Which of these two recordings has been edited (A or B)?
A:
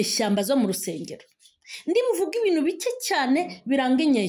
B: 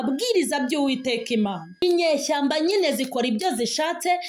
B